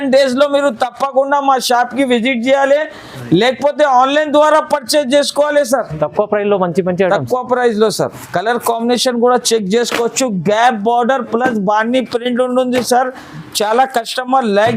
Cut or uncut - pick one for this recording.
cut